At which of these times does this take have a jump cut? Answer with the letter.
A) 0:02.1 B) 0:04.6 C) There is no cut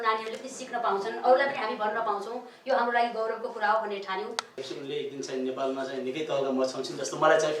B